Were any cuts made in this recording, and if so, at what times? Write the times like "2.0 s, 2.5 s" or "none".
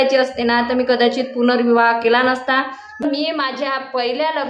3.0 s